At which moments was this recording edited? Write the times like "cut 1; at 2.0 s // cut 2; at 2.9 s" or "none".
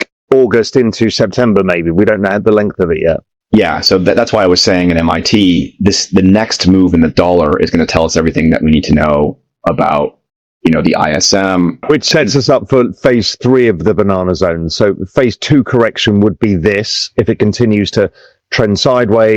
cut 1; at 11.8 s

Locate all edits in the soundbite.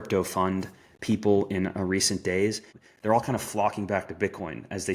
cut 1; at 2.7 s

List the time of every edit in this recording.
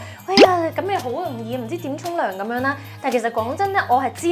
none

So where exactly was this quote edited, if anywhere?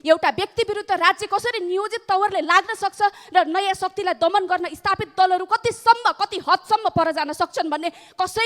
none

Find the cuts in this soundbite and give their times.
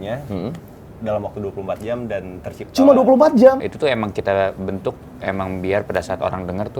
cut 1; at 3.7 s

